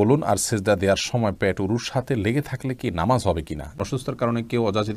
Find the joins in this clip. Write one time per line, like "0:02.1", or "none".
0:03.8